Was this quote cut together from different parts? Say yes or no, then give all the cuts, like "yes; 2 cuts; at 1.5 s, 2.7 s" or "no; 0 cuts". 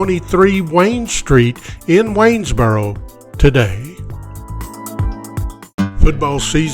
yes; 1 cut; at 5.6 s